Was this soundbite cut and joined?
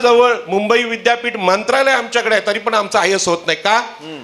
no; 0 cuts

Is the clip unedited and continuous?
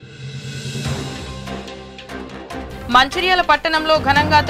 yes; 0 cuts

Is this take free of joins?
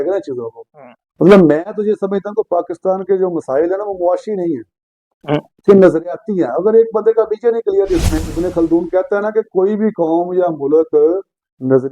no; 1 cut; at 8.1 s

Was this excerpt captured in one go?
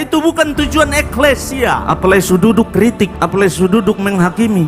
no; 2 cuts; at 1.9 s, 3.2 s

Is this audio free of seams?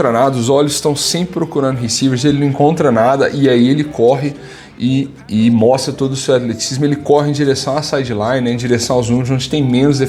yes; 0 cuts

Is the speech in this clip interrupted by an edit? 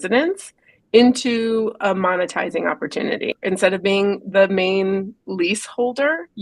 yes; 1 cut; at 3.4 s

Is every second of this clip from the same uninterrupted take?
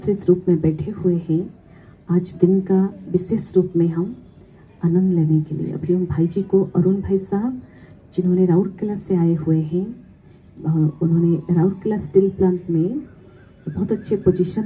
yes; 0 cuts

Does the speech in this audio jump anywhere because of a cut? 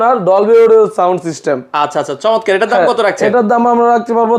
no; 0 cuts

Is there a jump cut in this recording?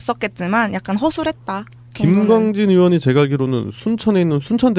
yes; 1 cut; at 1.6 s

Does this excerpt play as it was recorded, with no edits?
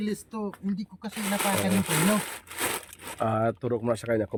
yes; 0 cuts

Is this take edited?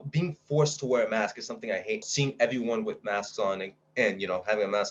yes; 1 cut; at 2.0 s

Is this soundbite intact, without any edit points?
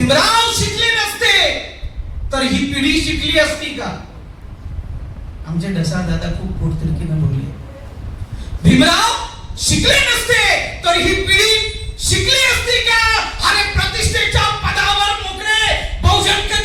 yes; 0 cuts

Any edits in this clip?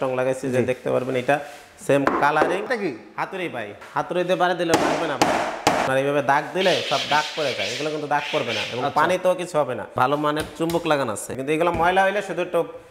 yes; 5 cuts; at 2.7 s, 3.8 s, 5.9 s, 9.8 s, 11.3 s

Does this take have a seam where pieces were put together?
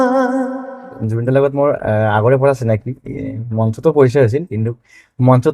yes; 1 cut; at 1.0 s

